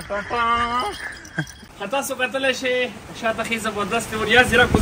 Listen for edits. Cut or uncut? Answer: cut